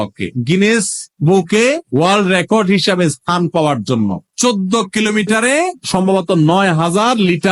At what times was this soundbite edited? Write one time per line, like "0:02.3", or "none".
none